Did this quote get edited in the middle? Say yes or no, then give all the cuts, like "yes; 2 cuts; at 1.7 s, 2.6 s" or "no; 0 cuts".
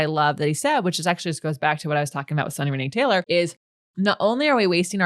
yes; 1 cut; at 3.2 s